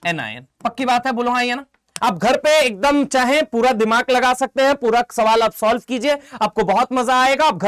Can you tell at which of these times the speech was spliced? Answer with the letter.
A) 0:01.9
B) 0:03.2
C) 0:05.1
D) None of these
A